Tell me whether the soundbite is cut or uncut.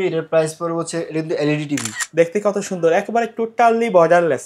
cut